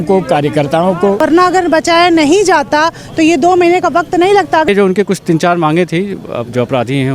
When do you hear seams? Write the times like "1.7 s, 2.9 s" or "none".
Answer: 1.2 s, 4.7 s